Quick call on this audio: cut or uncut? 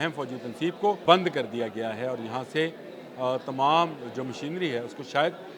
cut